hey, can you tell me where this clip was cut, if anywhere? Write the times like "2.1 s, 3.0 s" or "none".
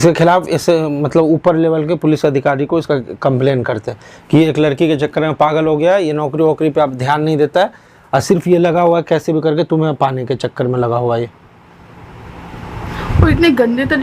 none